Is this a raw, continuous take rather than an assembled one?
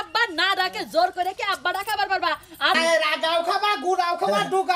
no; 1 cut; at 2.8 s

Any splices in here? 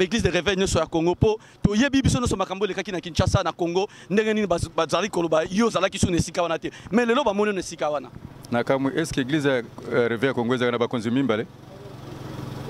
no; 0 cuts

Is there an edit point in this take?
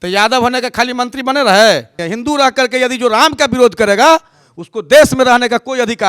yes; 1 cut; at 2.0 s

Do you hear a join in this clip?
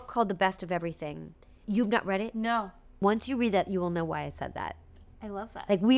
yes; 2 cuts; at 1.6 s, 3.0 s

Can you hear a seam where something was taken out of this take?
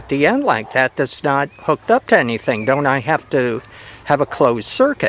no; 0 cuts

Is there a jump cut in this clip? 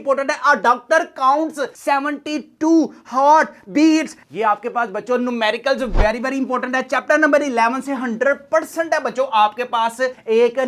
no; 0 cuts

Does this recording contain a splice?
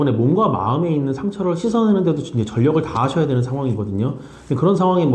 no; 0 cuts

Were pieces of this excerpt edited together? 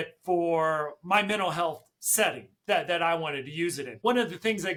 no; 0 cuts

